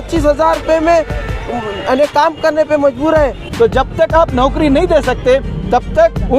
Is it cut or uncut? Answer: cut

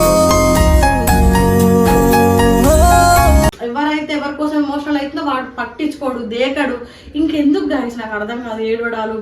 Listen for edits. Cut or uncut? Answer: cut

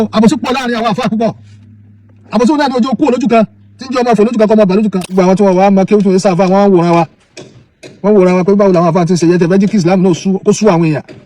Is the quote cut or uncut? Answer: cut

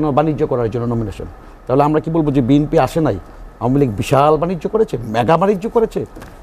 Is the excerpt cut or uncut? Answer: uncut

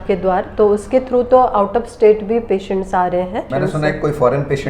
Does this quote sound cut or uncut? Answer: cut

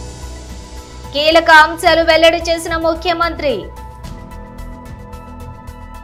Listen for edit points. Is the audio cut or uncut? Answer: uncut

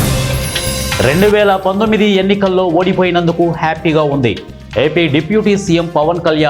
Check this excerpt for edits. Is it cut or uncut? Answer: cut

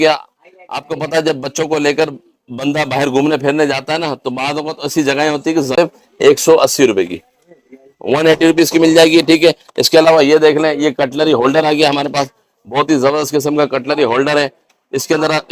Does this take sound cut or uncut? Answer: cut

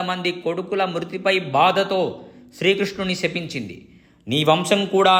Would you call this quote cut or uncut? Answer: uncut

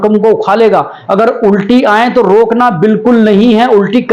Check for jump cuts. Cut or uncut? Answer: uncut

